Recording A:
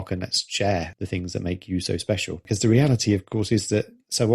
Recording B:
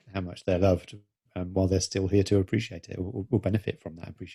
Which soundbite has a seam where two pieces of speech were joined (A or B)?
A